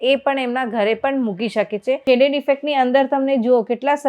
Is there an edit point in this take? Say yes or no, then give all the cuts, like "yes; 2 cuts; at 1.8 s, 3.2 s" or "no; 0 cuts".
yes; 1 cut; at 2.0 s